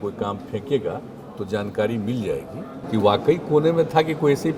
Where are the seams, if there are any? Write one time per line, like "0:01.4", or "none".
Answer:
0:02.7